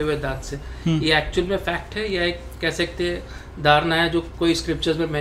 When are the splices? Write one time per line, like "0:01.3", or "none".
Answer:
none